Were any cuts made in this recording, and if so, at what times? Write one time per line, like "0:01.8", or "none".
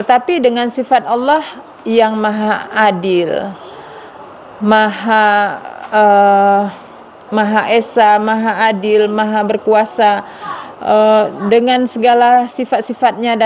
none